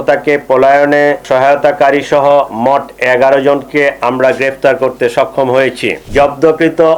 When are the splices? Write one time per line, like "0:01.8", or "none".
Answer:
0:01.2
0:06.0